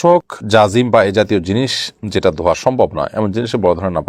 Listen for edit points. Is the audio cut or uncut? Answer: uncut